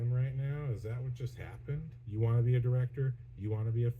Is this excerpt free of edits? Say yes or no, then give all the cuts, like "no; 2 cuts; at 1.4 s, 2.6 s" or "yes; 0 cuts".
no; 1 cut; at 2.0 s